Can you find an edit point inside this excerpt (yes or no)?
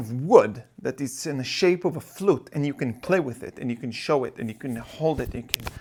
no